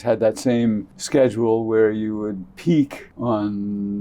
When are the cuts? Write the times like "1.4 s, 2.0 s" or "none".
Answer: 0.9 s, 3.0 s